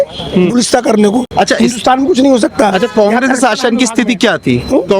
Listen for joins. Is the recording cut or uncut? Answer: uncut